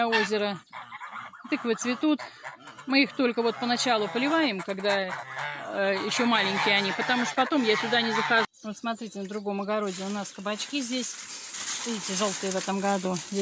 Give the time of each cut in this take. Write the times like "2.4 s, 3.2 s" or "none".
8.5 s

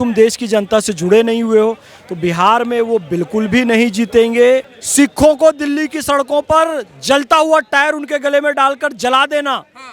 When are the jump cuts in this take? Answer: 4.8 s

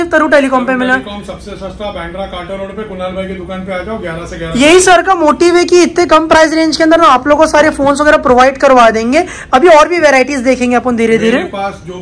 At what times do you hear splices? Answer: none

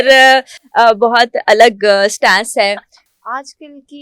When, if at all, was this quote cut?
3.0 s

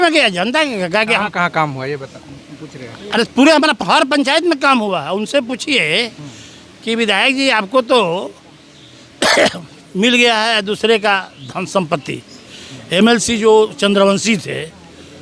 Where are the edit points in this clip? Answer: none

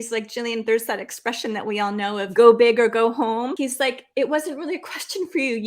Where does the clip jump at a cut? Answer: 2.3 s, 3.5 s

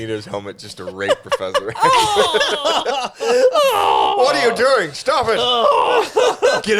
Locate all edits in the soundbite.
none

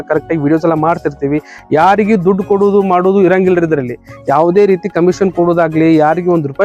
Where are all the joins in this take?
none

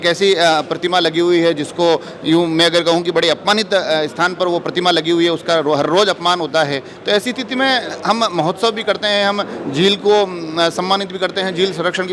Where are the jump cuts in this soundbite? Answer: none

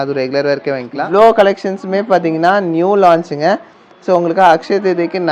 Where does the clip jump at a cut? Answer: 0.9 s

